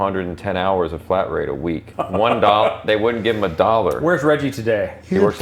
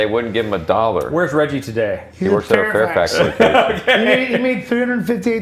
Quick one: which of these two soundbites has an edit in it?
first; 1 cut; at 1.9 s

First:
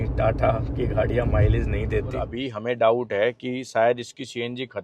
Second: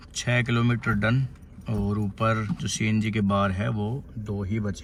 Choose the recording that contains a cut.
first; 1 cut; at 2.4 s

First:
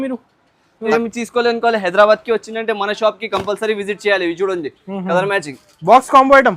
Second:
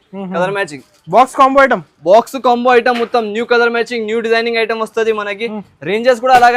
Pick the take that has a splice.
first; 1 cut; at 0.9 s

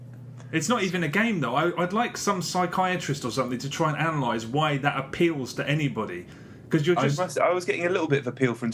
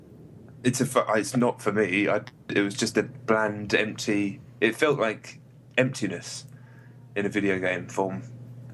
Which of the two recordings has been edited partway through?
second; 1 cut; at 1.9 s

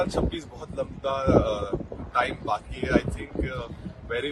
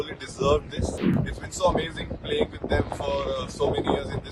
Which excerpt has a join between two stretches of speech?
second; 1 cut; at 1.1 s

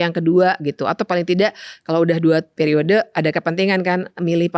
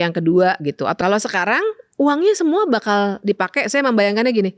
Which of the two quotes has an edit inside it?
second; 1 cut; at 1.0 s

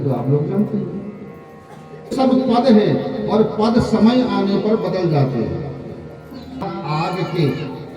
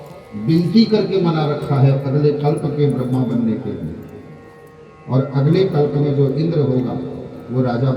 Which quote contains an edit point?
first; 2 cuts; at 2.1 s, 6.6 s

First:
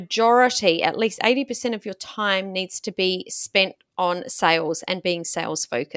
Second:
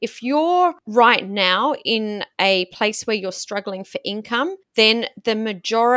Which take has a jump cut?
second; 2 cuts; at 0.8 s, 4.6 s

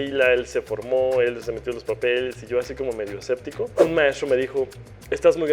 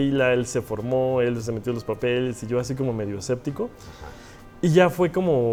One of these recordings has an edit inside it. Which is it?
first; 1 cut; at 3.7 s

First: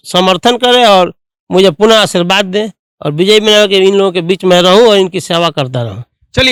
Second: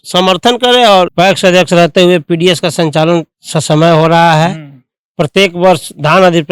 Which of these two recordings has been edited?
second; 1 cut; at 1.1 s

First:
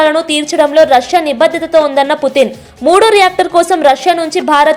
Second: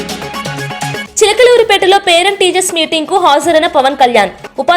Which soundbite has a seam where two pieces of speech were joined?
second; 1 cut; at 1.1 s

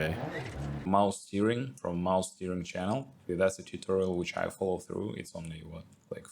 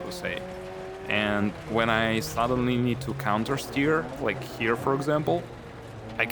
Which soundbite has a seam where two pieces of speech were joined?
first; 3 cuts; at 0.9 s, 1.7 s, 3.3 s

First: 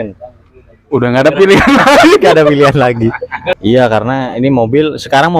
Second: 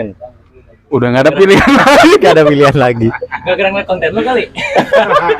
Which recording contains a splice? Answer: first; 1 cut; at 3.6 s

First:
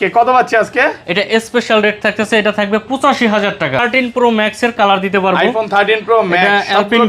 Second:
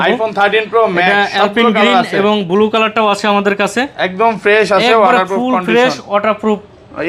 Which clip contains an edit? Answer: first; 1 cut; at 3.8 s

